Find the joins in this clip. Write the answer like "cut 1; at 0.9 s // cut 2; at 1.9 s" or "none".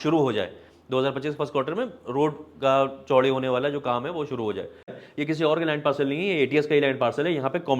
cut 1; at 5.0 s